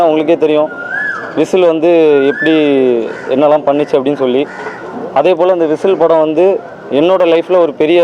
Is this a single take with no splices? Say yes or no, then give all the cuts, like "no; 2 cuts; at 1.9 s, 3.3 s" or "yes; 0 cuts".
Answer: yes; 0 cuts